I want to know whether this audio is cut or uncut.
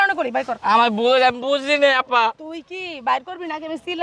uncut